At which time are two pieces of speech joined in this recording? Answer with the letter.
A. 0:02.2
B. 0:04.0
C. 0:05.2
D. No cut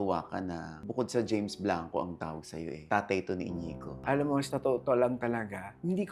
B